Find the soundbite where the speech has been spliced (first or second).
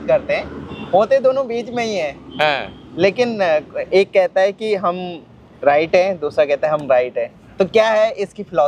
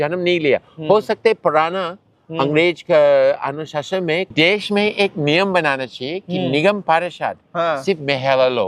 second